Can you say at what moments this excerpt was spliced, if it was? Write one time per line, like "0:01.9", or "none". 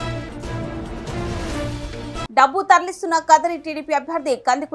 0:01.7